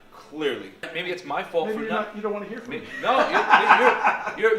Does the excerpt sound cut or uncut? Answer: cut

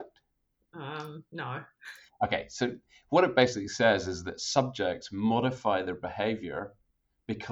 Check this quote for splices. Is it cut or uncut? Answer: uncut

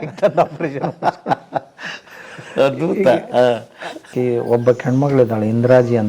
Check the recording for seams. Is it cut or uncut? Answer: cut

